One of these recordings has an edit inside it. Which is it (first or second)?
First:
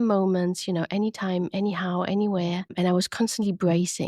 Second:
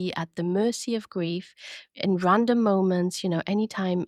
first